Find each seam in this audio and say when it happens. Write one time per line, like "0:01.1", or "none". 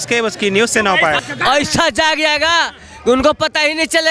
0:01.2